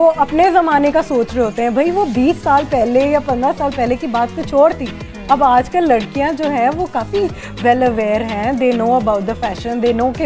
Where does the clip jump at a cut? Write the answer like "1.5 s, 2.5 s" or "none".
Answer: none